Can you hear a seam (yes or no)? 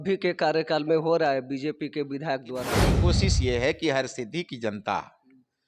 yes